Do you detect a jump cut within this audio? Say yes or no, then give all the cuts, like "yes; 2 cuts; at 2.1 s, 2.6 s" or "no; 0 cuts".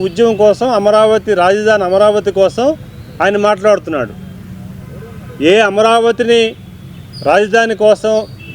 no; 0 cuts